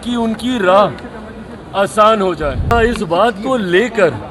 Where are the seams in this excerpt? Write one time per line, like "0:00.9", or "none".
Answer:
0:02.7